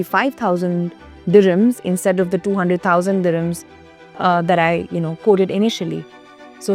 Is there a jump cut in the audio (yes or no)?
no